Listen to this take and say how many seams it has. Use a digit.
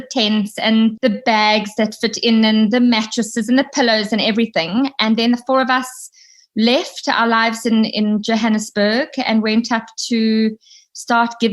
1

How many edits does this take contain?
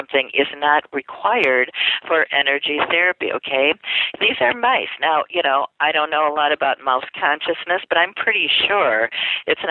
0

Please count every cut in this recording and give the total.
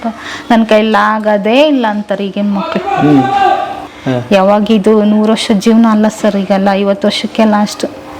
1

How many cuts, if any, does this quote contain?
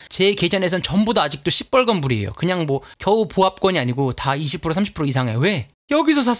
0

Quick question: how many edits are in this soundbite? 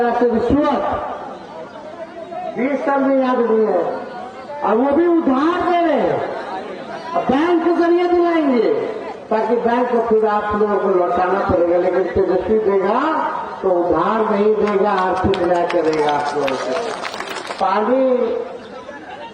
1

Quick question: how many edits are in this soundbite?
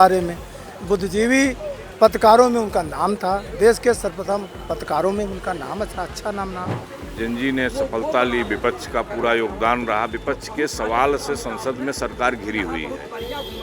1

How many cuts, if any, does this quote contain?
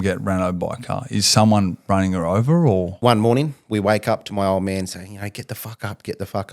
1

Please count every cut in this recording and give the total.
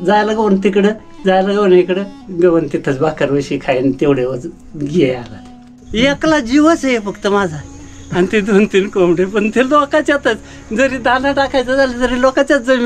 1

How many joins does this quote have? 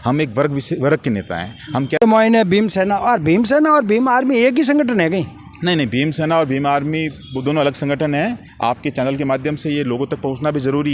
1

